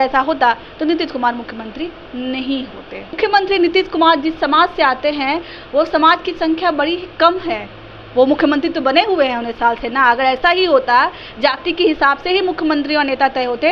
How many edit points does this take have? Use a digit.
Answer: 1